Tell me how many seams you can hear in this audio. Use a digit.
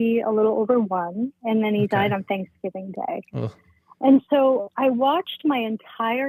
0